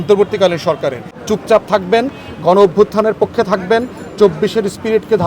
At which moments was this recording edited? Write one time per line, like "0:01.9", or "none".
0:01.1